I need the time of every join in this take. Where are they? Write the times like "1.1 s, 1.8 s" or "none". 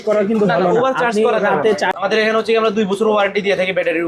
1.9 s